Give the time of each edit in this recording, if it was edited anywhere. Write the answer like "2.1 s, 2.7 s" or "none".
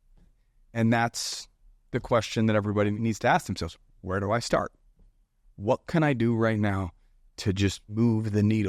2.9 s, 7.8 s